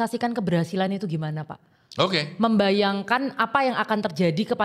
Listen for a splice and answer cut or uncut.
uncut